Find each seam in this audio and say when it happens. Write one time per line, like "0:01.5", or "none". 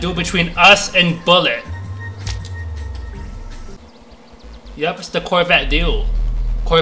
0:03.8